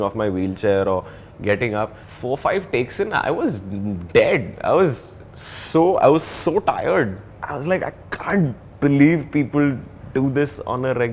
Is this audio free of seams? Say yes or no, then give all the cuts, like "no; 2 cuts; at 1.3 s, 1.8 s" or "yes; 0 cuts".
no; 2 cuts; at 2.1 s, 7.3 s